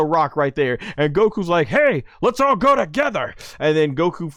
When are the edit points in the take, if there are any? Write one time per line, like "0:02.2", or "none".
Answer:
none